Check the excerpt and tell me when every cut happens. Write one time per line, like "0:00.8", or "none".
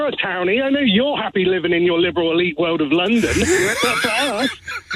none